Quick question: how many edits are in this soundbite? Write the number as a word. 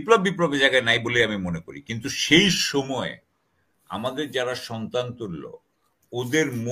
zero